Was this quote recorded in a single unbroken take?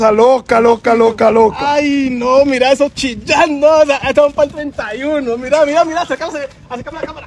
yes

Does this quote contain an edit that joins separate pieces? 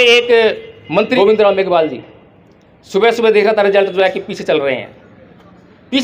yes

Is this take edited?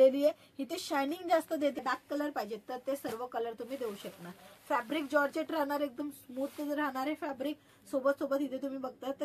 yes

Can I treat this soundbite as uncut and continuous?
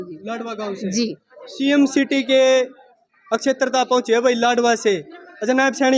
yes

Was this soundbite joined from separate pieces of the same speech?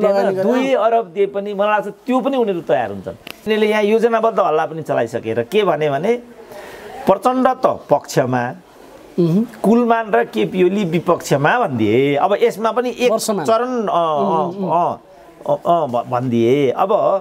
yes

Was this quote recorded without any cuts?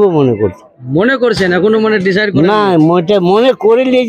yes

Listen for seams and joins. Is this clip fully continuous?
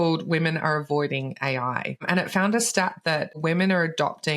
no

